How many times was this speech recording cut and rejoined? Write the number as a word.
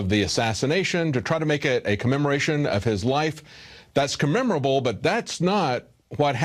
one